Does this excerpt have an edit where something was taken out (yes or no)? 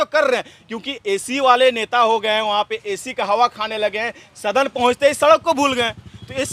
no